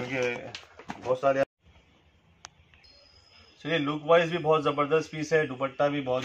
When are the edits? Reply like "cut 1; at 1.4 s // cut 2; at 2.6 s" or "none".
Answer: cut 1; at 1.4 s